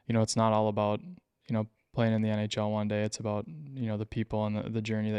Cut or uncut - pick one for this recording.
uncut